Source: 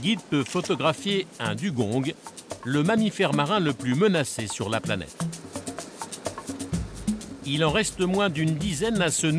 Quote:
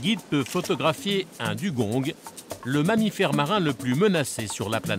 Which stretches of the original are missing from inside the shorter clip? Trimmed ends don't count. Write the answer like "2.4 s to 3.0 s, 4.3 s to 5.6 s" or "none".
none